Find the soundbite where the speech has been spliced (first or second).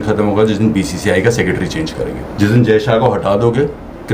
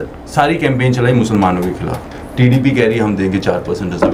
first